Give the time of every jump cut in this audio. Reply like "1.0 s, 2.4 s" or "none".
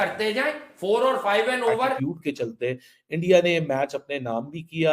2.0 s